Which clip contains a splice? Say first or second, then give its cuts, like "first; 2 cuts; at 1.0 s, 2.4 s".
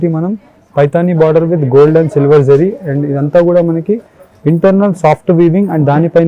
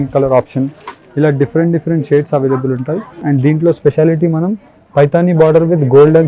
second; 1 cut; at 3.2 s